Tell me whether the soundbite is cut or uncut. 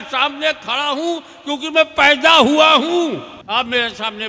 cut